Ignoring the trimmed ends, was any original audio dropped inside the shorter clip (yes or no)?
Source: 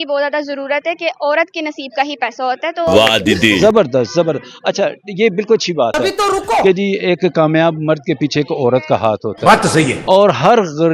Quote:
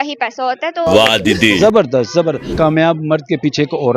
yes